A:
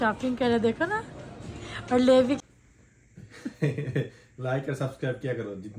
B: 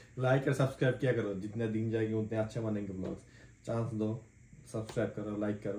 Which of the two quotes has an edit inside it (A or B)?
A